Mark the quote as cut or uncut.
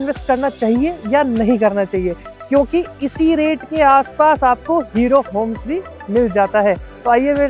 uncut